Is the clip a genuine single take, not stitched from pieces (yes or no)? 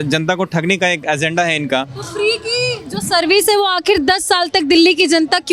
yes